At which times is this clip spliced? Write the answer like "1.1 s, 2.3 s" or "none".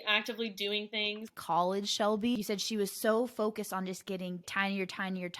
1.3 s, 2.4 s, 4.5 s